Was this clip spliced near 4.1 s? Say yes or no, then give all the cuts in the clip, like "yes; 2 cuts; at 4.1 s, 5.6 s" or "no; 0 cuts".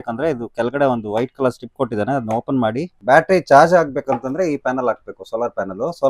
no; 1 cut; at 2.9 s